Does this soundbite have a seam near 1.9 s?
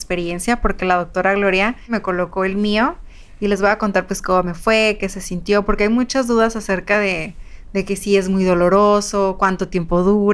yes; 1 cut; at 1.9 s

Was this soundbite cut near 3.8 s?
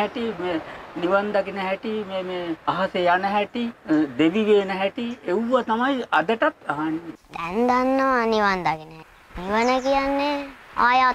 yes; 4 cuts; at 2.6 s, 3.8 s, 7.0 s, 9.0 s

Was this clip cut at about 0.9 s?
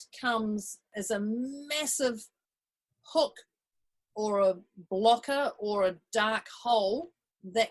yes; 1 cut; at 0.9 s

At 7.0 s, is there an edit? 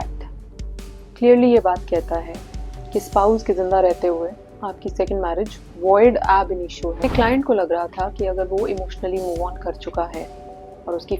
yes; 1 cut; at 7.0 s

